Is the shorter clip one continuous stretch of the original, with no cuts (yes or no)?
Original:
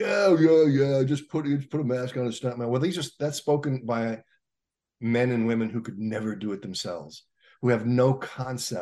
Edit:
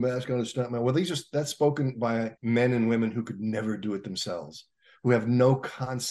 no